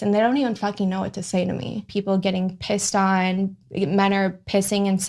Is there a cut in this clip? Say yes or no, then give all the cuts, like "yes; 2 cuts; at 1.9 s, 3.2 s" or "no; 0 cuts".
yes; 1 cut; at 1.9 s